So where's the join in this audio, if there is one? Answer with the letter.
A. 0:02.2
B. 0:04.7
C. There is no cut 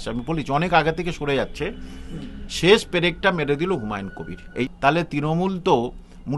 B